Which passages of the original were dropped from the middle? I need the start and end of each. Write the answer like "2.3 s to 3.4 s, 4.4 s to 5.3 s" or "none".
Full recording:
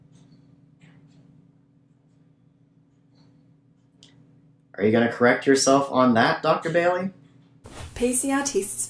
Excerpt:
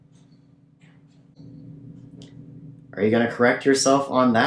1.4 s to 3.2 s